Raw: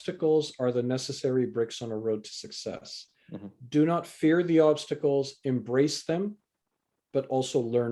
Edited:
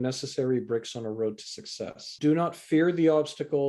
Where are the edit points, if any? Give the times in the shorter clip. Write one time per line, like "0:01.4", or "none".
0:02.0